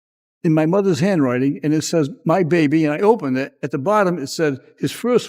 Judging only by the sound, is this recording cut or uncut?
cut